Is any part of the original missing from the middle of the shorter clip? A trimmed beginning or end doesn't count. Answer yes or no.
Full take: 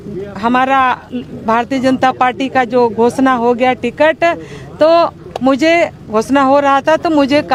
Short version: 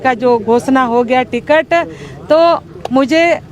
no